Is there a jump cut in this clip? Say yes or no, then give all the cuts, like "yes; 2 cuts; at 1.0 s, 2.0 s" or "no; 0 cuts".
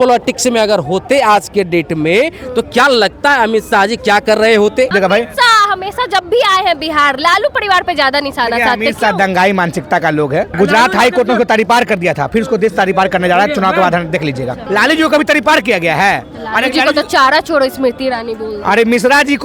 yes; 3 cuts; at 4.9 s, 10.5 s, 14.6 s